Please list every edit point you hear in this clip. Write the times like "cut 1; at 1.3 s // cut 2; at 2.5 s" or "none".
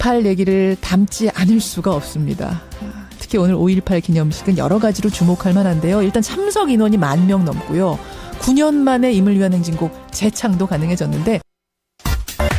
cut 1; at 8.9 s